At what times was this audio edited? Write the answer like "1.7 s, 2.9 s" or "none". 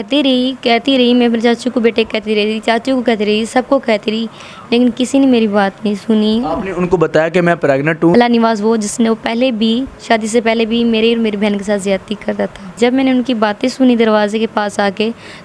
8.1 s, 12.8 s